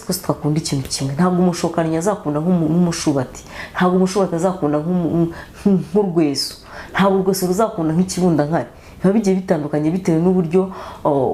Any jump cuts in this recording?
no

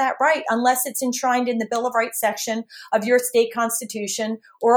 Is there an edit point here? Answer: no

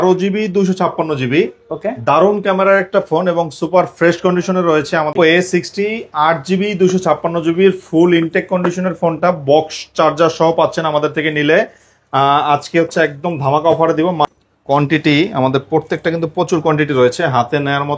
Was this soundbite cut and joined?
yes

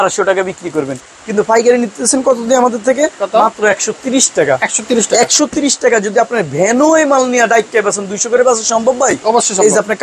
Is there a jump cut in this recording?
no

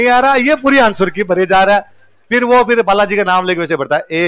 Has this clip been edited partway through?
no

